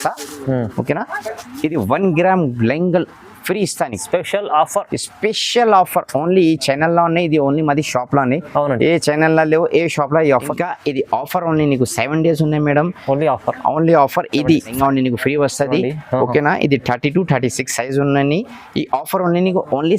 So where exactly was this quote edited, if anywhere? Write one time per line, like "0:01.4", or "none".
0:01.2
0:10.5
0:14.7